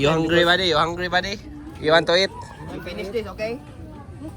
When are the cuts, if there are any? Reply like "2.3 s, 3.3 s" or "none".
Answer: none